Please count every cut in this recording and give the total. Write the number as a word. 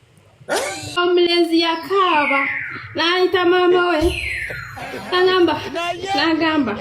one